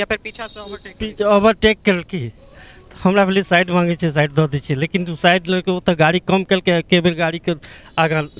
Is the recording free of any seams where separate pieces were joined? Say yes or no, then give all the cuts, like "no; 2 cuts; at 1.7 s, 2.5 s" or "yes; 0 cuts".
yes; 0 cuts